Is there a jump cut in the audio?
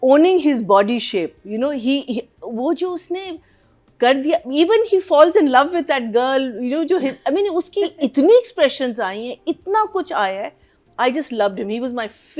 no; 0 cuts

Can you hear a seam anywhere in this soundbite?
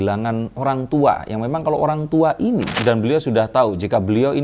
yes; 1 cut; at 2.7 s

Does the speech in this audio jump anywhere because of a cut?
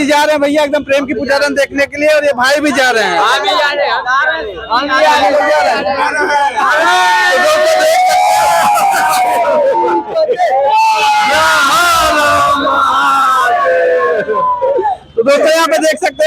no; 0 cuts

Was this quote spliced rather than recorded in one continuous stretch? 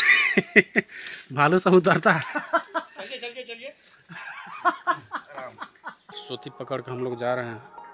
yes; 1 cut; at 6.1 s

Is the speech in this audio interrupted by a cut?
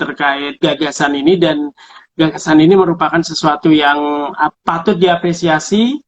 yes; 1 cut; at 4.5 s

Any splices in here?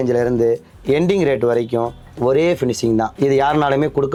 no; 0 cuts

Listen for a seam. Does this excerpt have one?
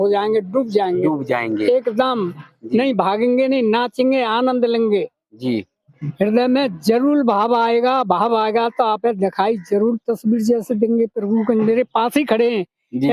yes; 1 cut; at 6.0 s

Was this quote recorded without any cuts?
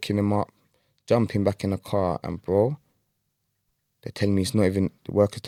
yes; 0 cuts

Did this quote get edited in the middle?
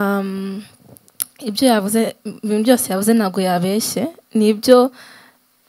no; 0 cuts

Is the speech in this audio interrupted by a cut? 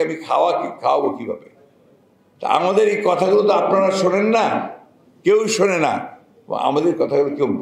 no; 0 cuts

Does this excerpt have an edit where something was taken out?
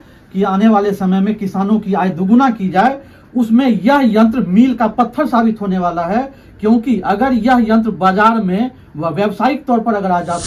no; 0 cuts

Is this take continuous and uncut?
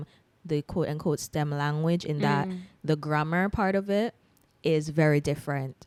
yes; 0 cuts

